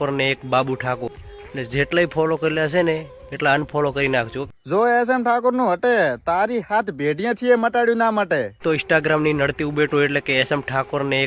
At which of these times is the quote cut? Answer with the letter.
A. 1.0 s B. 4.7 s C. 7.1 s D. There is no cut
A